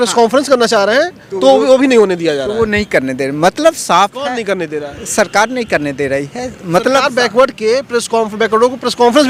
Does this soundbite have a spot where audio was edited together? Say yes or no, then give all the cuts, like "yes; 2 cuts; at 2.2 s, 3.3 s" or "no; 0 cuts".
no; 0 cuts